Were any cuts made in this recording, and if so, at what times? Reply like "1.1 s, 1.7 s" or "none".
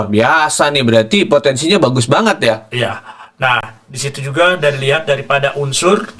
none